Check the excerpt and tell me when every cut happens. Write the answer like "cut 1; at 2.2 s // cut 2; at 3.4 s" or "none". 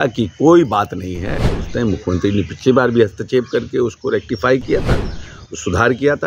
cut 1; at 1.6 s